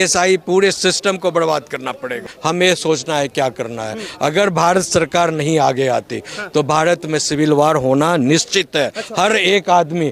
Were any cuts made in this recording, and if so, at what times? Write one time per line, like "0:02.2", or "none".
0:02.3